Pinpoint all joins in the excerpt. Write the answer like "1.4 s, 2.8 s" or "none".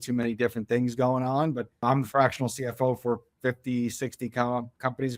1.8 s